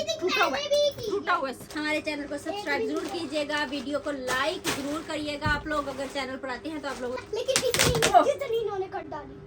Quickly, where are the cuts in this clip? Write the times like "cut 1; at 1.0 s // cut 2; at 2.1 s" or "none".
cut 1; at 1.6 s // cut 2; at 7.2 s